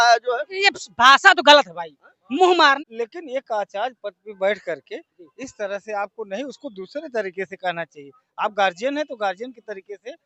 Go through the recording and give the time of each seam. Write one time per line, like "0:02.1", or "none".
0:02.8